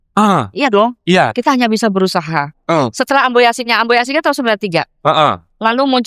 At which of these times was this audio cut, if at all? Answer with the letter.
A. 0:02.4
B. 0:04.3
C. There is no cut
C